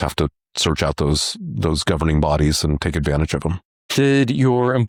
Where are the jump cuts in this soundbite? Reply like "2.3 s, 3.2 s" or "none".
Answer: none